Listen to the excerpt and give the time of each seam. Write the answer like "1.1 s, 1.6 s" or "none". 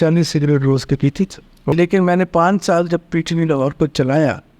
1.7 s

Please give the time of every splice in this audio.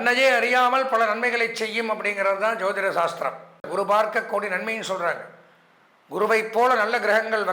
3.7 s

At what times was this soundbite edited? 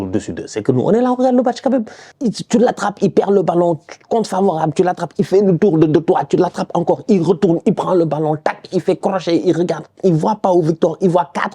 2.0 s

